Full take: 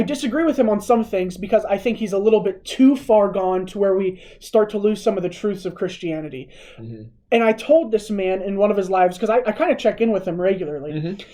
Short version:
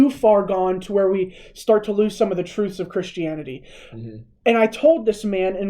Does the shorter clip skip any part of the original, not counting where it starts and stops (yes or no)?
no